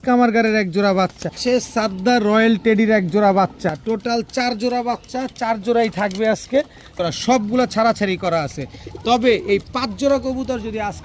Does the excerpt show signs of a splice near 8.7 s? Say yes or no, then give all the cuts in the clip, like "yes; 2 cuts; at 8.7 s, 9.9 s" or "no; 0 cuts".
no; 3 cuts; at 1.4 s, 3.7 s, 6.9 s